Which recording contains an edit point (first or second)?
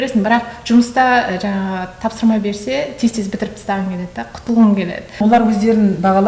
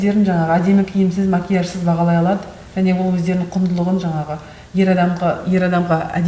first